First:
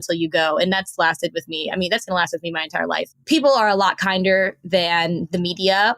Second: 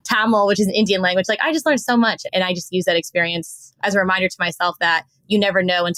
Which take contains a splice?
first; 1 cut; at 3.1 s

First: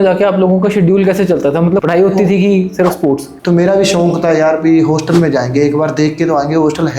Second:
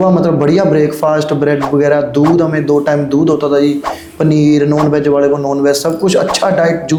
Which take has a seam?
first; 2 cuts; at 1.8 s, 3.3 s

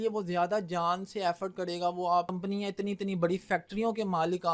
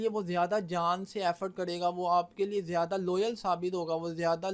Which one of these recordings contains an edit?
first; 1 cut; at 2.3 s

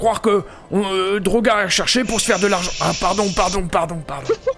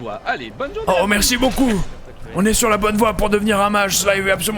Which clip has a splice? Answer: second; 1 cut; at 2.2 s

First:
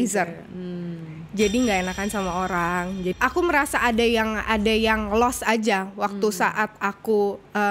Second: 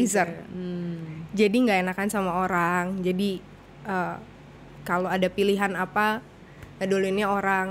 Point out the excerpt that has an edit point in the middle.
first; 1 cut; at 3.2 s

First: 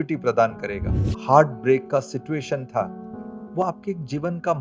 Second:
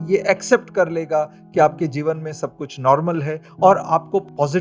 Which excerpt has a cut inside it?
first; 1 cut; at 1.1 s

